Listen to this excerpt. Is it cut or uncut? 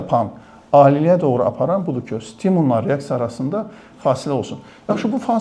uncut